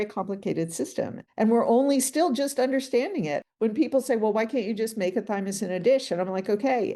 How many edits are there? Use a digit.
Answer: 1